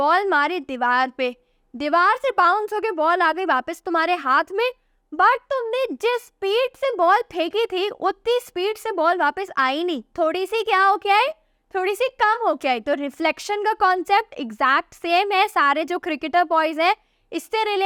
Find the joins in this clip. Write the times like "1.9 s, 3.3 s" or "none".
none